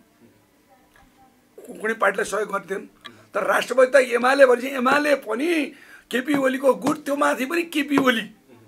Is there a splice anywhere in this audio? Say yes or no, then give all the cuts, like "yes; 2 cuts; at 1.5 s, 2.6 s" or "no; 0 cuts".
no; 0 cuts